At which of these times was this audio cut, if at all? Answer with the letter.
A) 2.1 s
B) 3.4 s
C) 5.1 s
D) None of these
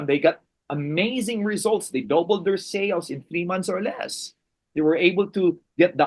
D